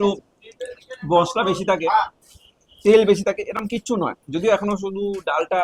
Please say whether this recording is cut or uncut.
uncut